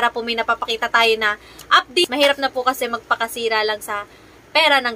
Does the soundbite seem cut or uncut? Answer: cut